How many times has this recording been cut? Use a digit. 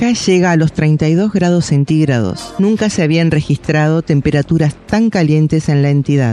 1